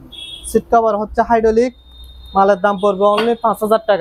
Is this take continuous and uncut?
yes; 0 cuts

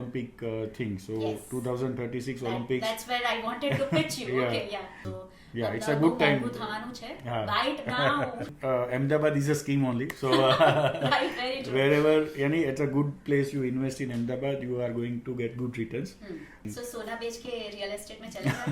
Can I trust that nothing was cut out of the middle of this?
no; 3 cuts; at 5.1 s, 8.6 s, 16.6 s

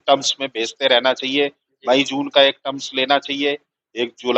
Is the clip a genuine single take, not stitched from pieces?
yes; 0 cuts

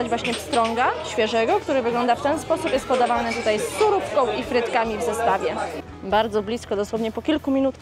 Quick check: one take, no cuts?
no; 1 cut; at 5.8 s

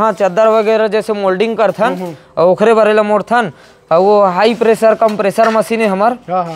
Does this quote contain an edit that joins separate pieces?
no; 0 cuts

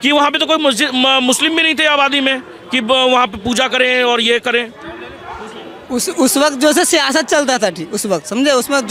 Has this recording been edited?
no; 0 cuts

